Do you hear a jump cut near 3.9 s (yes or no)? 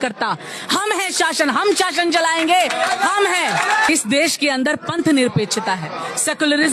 yes